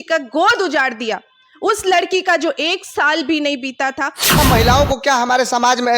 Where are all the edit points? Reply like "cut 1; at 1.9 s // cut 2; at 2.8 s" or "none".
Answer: cut 1; at 4.3 s